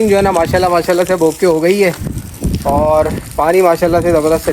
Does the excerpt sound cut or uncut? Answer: uncut